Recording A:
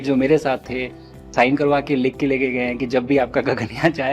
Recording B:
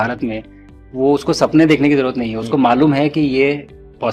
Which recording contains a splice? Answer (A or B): A